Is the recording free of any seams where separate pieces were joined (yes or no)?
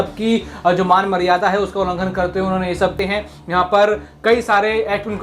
no